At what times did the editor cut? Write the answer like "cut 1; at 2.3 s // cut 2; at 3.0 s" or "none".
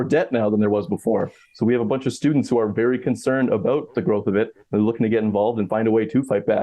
cut 1; at 5.7 s